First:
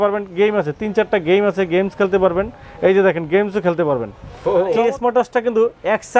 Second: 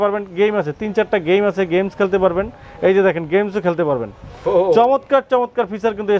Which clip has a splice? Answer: first; 1 cut; at 4.8 s

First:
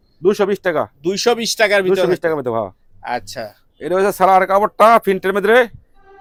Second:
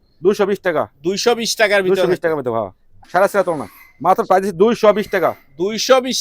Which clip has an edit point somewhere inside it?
second; 1 cut; at 2.9 s

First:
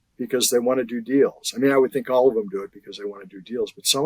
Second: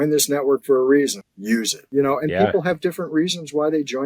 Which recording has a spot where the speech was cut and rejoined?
second; 1 cut; at 1.7 s

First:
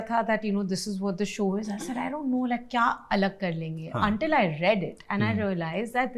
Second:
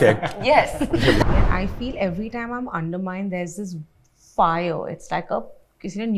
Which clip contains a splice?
second; 1 cut; at 1.2 s

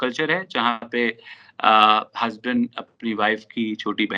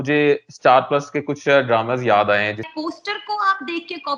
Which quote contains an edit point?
second; 1 cut; at 2.7 s

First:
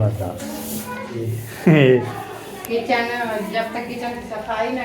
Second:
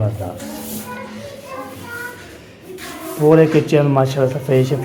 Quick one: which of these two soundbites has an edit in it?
first; 1 cut; at 1.4 s

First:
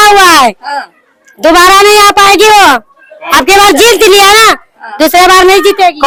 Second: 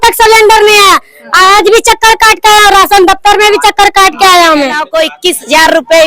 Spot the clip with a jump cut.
second; 1 cut; at 4.8 s

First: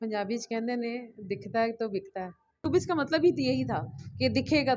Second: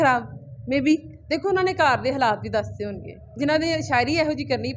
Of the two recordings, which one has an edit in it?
first; 1 cut; at 2.6 s

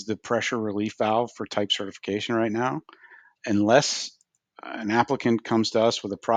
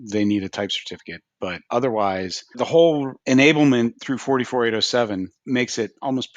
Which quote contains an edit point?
second; 5 cuts; at 1.6 s, 2.5 s, 3.1 s, 4.1 s, 5.4 s

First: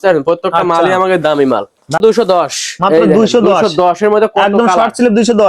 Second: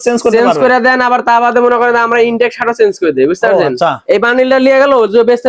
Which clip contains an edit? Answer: first; 1 cut; at 2.0 s

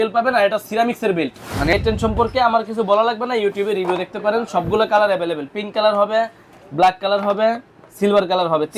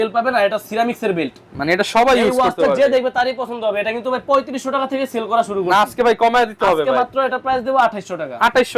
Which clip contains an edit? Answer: first; 1 cut; at 1.7 s

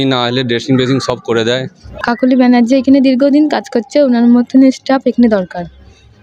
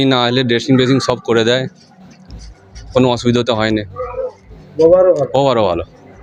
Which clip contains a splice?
first; 1 cut; at 2.1 s

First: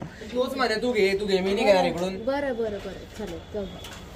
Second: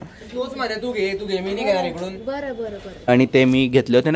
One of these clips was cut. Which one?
second; 1 cut; at 2.9 s

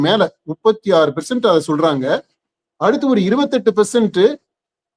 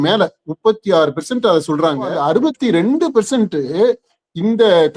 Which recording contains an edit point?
second; 1 cut; at 2.1 s

